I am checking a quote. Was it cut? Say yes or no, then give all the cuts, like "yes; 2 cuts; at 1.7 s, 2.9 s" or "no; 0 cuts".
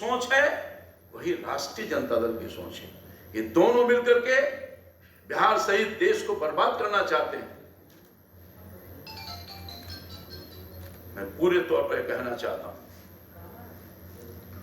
no; 0 cuts